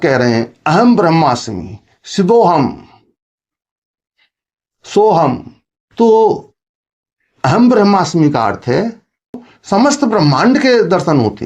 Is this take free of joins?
no; 1 cut; at 9.5 s

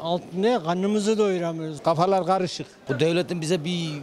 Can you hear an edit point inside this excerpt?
yes; 2 cuts; at 1.7 s, 2.7 s

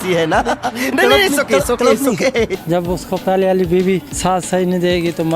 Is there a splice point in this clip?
yes; 2 cuts; at 2.6 s, 4.1 s

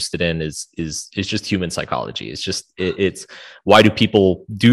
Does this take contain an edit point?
no; 0 cuts

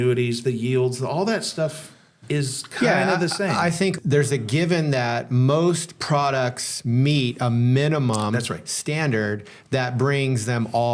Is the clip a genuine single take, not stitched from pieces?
no; 1 cut; at 3.9 s

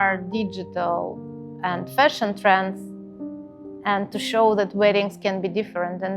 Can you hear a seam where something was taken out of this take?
no; 0 cuts

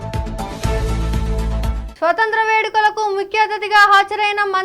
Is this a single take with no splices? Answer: no; 1 cut; at 1.9 s

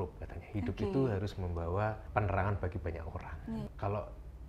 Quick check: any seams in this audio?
yes; 2 cuts; at 2.0 s, 3.7 s

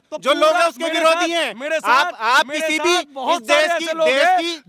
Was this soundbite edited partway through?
no; 0 cuts

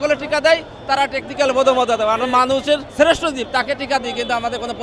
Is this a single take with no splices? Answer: no; 1 cut; at 2.9 s

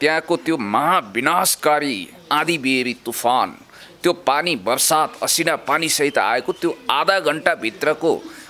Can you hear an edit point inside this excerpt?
no; 0 cuts

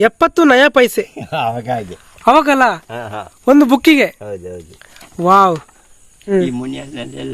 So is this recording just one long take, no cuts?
no; 1 cut; at 6.1 s

